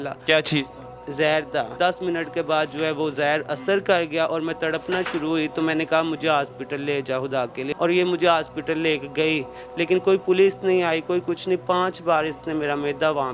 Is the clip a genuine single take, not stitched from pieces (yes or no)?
no